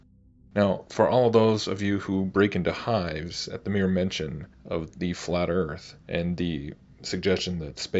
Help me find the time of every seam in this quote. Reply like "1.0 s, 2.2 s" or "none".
1.4 s